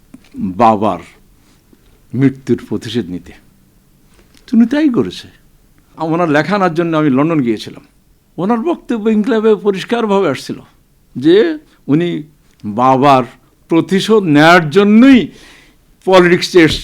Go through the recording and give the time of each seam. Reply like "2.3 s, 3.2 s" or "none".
5.9 s